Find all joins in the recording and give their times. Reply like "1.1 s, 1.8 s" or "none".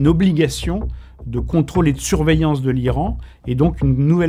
none